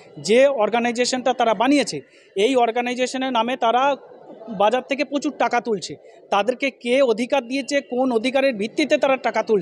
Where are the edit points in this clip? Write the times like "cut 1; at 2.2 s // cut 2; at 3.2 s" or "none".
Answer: cut 1; at 1.0 s